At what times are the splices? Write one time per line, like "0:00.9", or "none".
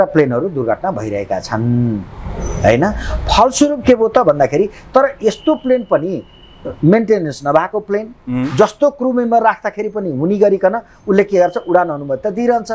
none